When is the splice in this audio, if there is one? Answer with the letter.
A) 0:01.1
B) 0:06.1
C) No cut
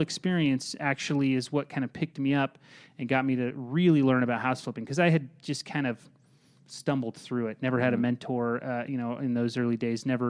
C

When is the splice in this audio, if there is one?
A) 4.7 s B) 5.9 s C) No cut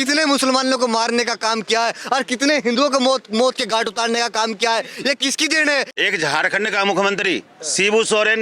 B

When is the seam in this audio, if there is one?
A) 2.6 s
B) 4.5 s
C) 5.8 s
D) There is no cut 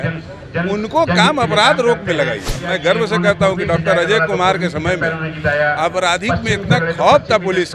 A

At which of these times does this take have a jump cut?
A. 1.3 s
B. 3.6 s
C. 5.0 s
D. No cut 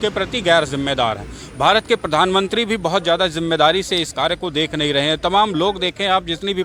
D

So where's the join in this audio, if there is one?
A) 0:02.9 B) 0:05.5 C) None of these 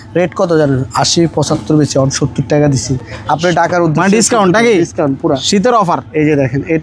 C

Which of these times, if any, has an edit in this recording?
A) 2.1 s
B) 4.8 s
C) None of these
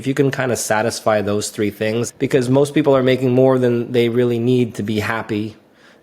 A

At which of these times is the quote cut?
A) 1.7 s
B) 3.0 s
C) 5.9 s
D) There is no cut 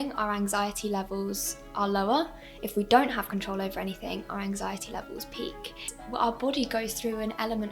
C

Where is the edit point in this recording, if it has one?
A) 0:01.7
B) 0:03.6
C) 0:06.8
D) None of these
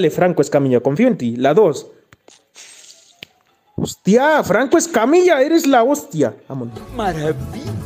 C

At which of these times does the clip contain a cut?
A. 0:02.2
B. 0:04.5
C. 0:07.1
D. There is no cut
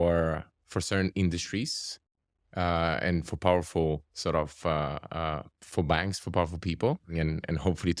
C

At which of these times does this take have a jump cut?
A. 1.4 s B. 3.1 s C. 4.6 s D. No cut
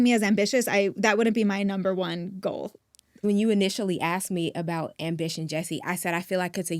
B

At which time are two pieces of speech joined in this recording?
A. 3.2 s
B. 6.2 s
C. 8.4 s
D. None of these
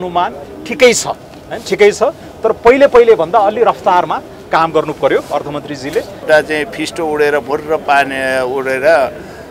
B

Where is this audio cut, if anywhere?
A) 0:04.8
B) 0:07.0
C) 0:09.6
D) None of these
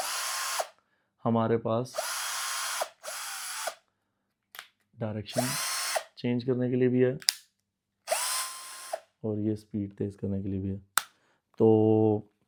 D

